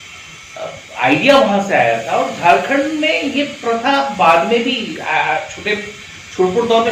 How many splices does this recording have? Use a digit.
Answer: 0